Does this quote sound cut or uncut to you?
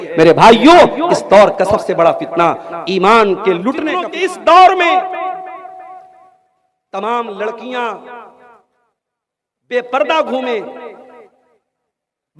cut